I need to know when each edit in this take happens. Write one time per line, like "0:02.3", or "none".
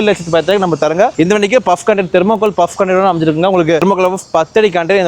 0:01.1
0:03.8